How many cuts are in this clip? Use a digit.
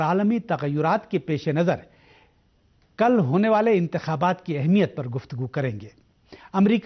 0